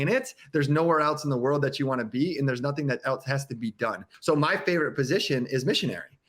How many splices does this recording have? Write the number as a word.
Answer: one